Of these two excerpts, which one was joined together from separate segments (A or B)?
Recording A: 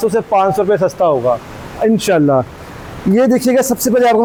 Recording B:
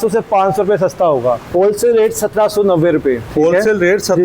B